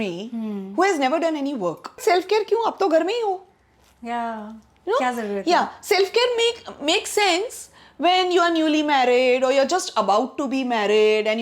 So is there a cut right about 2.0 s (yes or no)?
yes